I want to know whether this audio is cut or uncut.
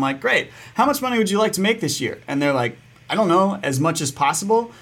uncut